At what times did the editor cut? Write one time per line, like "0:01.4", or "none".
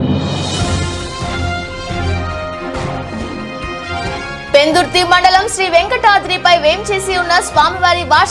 0:04.4